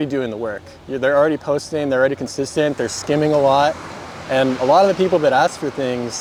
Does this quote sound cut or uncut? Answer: uncut